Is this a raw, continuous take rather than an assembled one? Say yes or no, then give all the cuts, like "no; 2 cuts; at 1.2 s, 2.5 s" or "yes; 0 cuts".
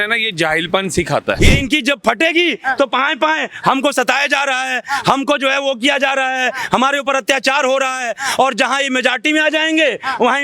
no; 1 cut; at 1.4 s